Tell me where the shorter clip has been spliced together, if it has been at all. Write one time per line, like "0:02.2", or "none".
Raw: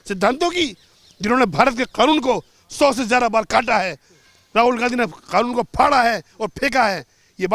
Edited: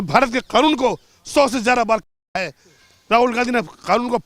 none